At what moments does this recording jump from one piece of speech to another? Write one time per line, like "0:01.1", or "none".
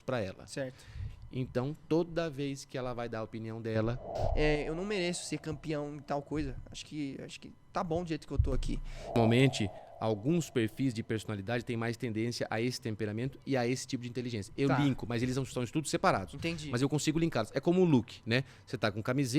0:04.2
0:09.1